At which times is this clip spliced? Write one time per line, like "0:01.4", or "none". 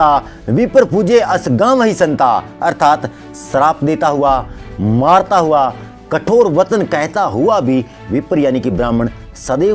none